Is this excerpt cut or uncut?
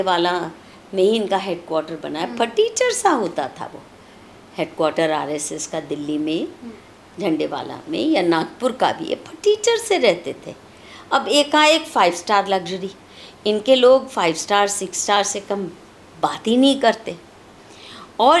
uncut